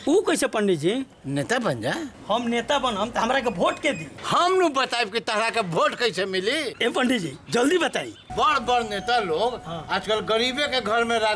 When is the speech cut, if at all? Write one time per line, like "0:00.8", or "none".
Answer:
0:02.1
0:04.1
0:06.7